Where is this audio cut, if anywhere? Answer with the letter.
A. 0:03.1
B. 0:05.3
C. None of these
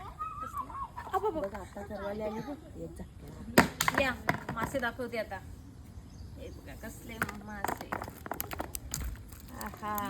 A